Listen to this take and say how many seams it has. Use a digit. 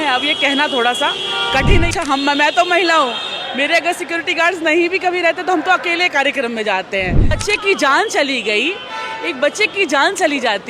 2